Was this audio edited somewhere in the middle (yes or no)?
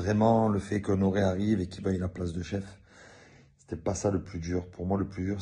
yes